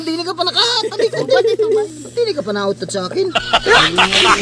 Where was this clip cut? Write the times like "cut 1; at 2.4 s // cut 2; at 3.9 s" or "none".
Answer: cut 1; at 3.4 s